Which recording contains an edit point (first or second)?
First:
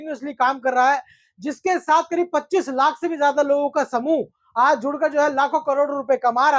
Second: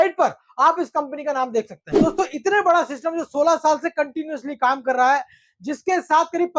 second